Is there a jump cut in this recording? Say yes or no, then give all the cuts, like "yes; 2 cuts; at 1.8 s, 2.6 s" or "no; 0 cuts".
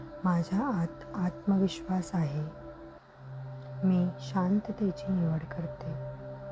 yes; 1 cut; at 5.6 s